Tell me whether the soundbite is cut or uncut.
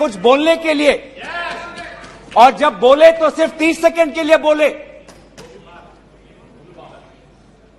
uncut